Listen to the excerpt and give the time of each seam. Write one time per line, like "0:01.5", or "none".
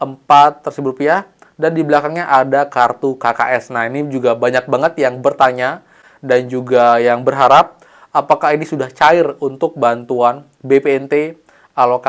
none